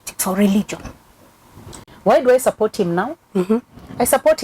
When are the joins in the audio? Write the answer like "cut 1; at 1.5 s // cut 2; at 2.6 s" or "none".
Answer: cut 1; at 1.7 s